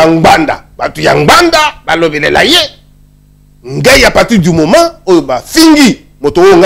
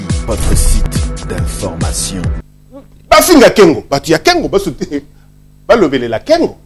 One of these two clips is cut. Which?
second; 1 cut; at 2.3 s

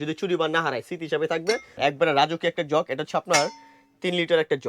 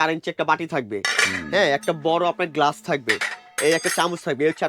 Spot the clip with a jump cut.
first; 1 cut; at 1.7 s

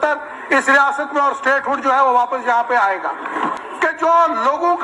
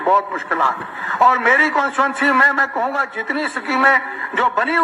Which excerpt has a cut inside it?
first; 1 cut; at 3.6 s

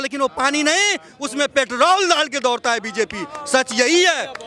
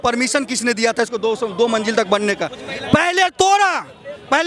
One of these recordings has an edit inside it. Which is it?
second; 1 cut; at 2.6 s

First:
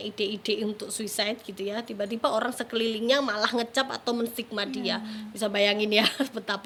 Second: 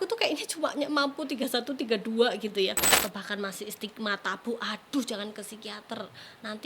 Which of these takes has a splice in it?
second; 1 cut; at 3.0 s

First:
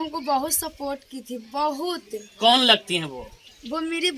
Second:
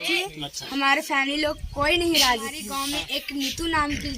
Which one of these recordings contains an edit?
second; 1 cut; at 2.7 s

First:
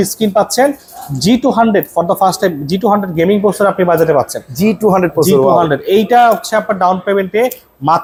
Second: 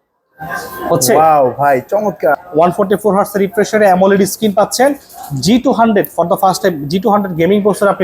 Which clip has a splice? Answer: second; 1 cut; at 2.4 s

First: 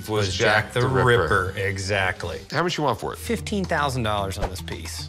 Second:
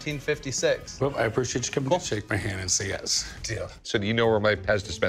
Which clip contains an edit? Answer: second; 3 cuts; at 0.9 s, 2.0 s, 3.6 s

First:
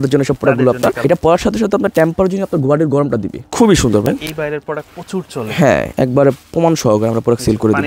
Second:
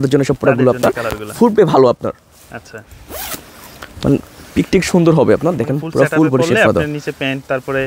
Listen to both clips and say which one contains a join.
first; 3 cuts; at 1.0 s, 3.4 s, 5.9 s

